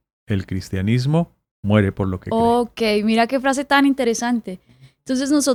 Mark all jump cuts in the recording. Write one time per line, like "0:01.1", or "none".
none